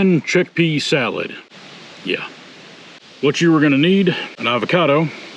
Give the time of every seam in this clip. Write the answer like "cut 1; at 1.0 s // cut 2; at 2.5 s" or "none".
cut 1; at 3.0 s // cut 2; at 4.4 s